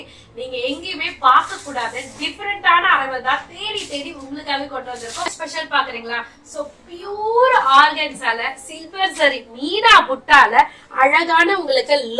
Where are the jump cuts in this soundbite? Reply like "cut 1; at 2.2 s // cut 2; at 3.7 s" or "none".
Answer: cut 1; at 5.3 s